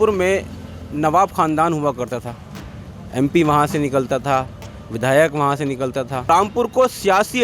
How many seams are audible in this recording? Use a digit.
1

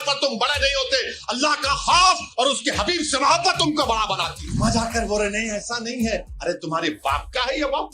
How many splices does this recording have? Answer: 1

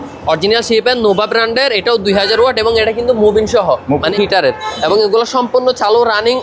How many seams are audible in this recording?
1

